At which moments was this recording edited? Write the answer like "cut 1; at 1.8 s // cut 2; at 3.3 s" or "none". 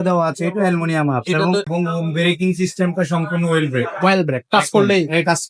cut 1; at 1.7 s